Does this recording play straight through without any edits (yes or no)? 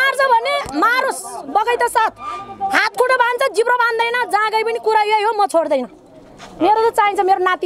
yes